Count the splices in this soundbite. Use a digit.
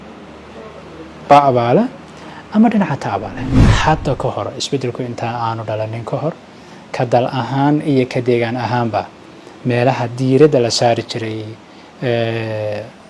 1